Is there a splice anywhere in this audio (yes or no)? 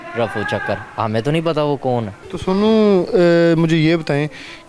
no